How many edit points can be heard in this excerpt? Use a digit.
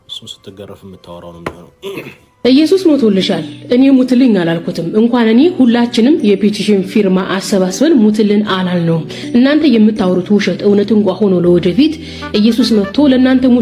1